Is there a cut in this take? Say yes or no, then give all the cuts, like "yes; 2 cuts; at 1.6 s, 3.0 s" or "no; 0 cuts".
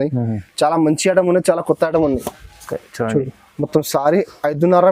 no; 0 cuts